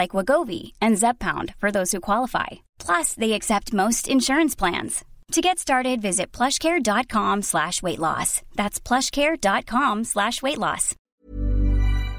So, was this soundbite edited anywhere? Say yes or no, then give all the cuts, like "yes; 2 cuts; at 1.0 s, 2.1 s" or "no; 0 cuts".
yes; 1 cut; at 11.0 s